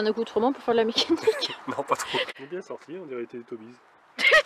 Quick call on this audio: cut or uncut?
cut